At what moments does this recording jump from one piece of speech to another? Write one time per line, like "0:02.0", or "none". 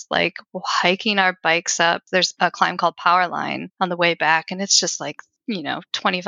0:02.1
0:03.6
0:05.3